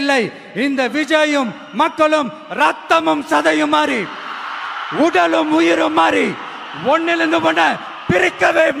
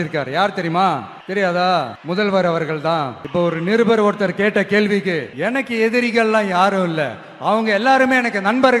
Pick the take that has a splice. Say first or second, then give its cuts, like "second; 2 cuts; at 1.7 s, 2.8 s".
second; 4 cuts; at 1.1 s, 2.0 s, 3.2 s, 5.3 s